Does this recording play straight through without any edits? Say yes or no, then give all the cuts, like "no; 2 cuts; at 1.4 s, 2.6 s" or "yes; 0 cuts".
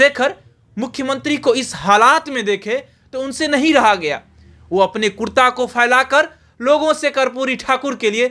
yes; 0 cuts